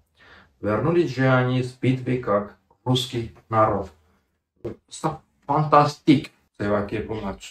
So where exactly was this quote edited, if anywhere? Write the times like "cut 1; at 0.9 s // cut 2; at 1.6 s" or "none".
cut 1; at 6.4 s